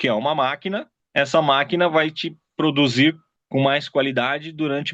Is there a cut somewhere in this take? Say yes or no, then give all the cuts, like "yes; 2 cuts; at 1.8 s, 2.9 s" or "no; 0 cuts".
yes; 2 cuts; at 1.0 s, 3.3 s